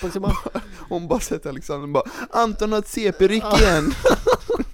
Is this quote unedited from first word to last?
yes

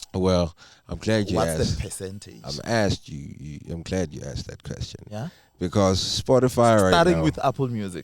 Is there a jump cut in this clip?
no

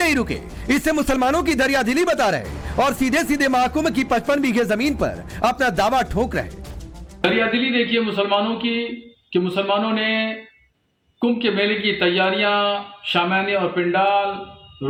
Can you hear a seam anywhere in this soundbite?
no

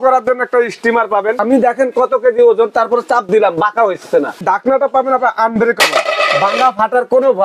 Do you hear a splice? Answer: yes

